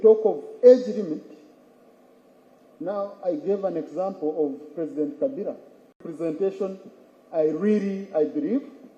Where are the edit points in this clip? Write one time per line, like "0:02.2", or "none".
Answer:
0:05.8